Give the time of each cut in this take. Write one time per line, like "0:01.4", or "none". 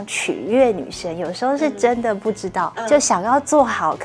0:02.8